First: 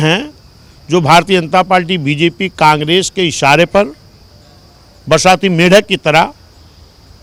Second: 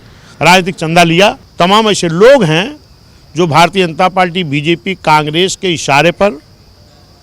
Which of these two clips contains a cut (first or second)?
second